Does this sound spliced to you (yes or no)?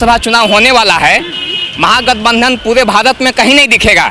no